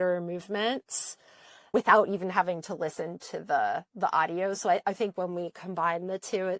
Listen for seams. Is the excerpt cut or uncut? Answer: uncut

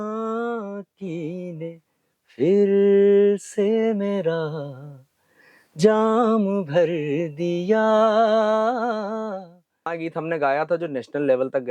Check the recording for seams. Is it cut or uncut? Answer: cut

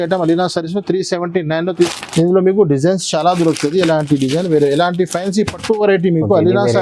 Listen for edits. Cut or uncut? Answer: cut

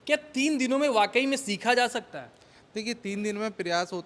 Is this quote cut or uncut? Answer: uncut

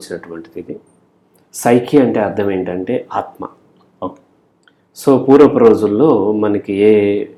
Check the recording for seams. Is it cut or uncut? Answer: uncut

